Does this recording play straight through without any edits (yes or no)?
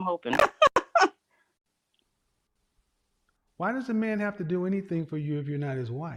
yes